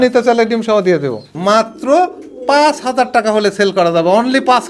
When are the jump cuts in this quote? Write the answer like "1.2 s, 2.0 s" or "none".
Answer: 1.3 s